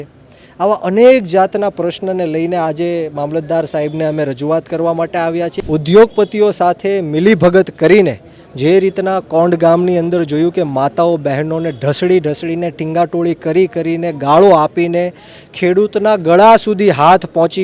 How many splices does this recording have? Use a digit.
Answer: 1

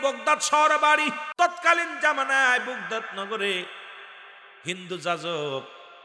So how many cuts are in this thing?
1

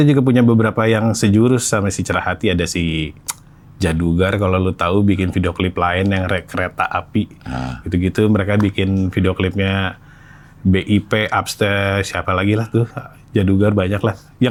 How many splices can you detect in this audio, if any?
0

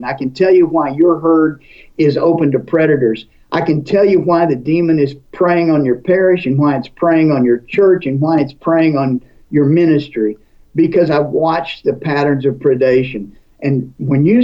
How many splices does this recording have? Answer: 0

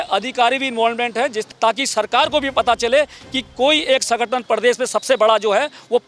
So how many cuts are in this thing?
1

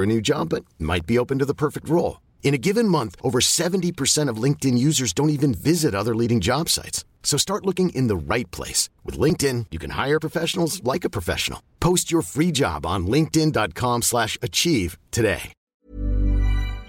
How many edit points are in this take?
1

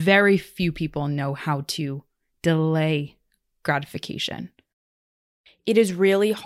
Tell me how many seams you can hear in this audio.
1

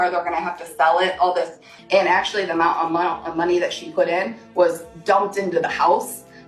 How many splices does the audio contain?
1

